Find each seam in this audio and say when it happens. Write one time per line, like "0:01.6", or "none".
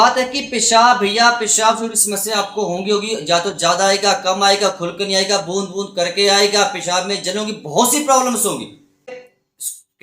0:09.1